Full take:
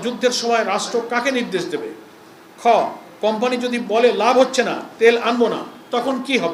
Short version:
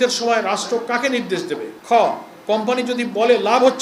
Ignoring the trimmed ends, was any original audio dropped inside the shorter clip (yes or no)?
yes